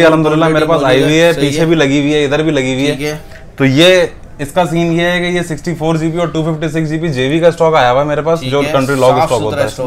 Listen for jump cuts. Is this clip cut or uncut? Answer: uncut